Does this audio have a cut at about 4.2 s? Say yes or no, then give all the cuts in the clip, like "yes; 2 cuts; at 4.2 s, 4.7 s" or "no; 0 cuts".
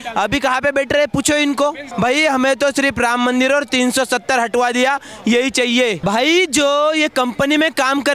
no; 2 cuts; at 1.9 s, 6.0 s